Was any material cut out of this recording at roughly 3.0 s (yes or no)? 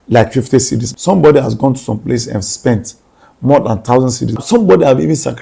no